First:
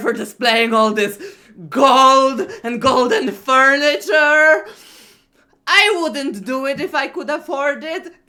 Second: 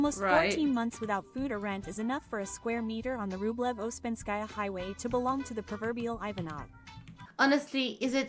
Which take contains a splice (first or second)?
second